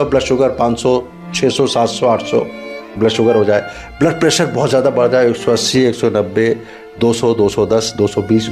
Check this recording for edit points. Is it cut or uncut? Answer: uncut